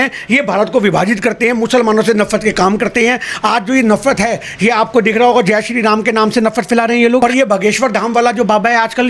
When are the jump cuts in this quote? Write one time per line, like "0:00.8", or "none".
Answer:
0:07.2